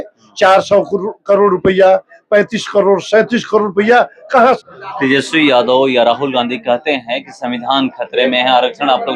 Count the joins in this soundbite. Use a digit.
1